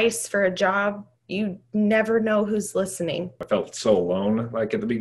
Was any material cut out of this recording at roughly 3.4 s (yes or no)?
yes